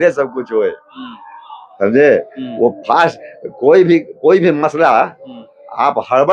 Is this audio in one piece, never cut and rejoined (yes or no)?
yes